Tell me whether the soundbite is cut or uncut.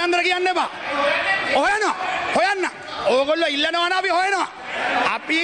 uncut